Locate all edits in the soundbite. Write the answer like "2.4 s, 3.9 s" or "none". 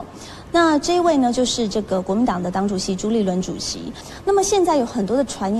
4.0 s